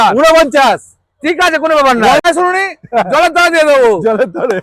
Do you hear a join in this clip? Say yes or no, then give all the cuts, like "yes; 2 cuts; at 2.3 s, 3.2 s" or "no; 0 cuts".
yes; 1 cut; at 2.2 s